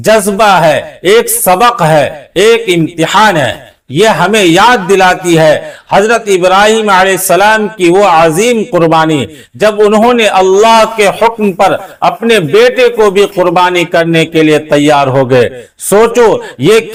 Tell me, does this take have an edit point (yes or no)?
no